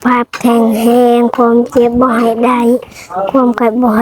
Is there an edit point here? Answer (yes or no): no